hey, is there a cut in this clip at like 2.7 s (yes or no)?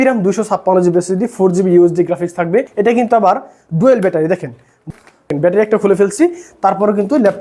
yes